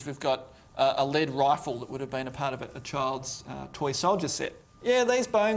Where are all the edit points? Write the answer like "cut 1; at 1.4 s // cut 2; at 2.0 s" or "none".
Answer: cut 1; at 4.7 s